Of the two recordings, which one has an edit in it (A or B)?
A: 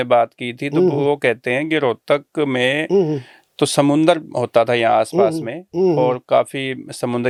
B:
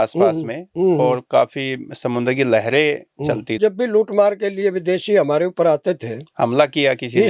B